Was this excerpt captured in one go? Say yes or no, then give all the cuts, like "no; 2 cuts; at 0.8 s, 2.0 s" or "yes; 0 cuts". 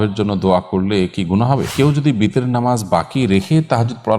no; 1 cut; at 1.7 s